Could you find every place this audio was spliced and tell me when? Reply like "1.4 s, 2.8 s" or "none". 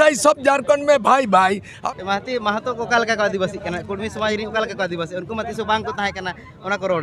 1.7 s